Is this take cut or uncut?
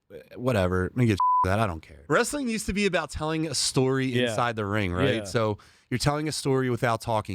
cut